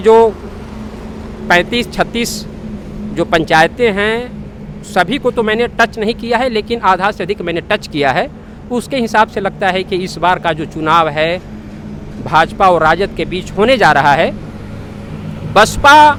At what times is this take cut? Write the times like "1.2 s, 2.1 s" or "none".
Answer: none